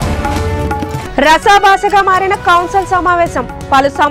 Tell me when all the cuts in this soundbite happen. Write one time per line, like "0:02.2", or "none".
none

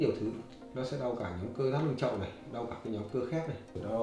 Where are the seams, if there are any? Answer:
none

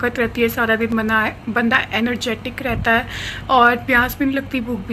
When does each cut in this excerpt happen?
none

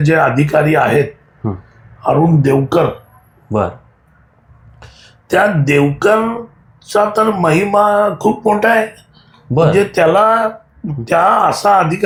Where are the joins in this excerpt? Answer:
none

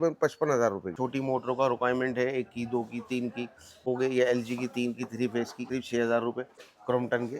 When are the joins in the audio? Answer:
0:01.0
0:03.8
0:05.6
0:06.6

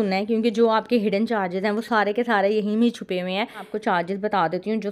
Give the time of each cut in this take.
0:03.7

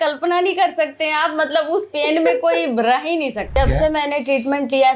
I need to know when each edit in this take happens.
0:03.6

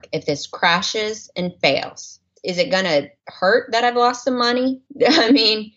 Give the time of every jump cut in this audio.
0:02.3

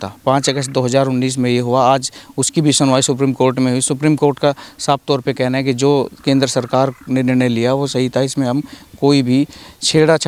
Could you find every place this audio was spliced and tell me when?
none

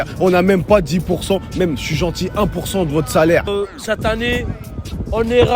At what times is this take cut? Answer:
0:03.5

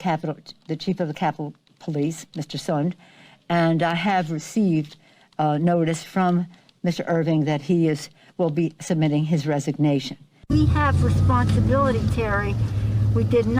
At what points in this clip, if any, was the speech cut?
0:10.4

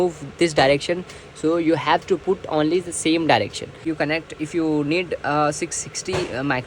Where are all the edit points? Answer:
0:03.8

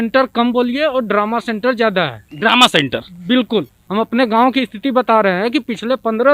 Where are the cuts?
0:03.8

